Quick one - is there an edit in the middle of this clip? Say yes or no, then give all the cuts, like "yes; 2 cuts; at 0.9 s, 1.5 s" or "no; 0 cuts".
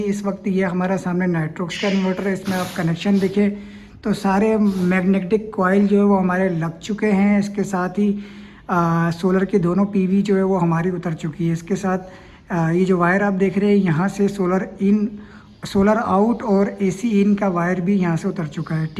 no; 0 cuts